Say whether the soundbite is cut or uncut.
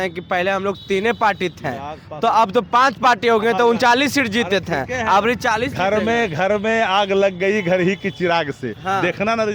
uncut